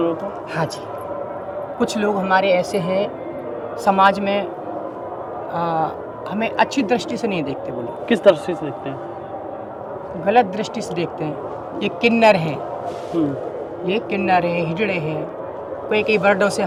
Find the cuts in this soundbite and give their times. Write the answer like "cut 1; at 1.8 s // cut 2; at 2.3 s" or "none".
none